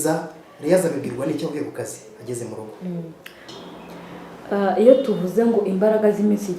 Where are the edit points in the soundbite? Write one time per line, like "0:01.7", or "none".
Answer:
0:03.6

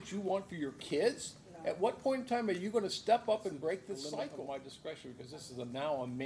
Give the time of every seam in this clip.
0:04.5

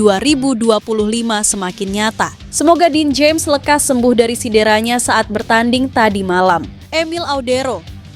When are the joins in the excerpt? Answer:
0:02.4
0:06.8

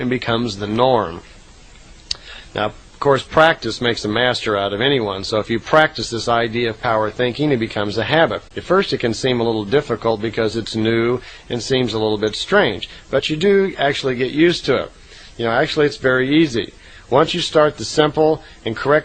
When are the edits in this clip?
none

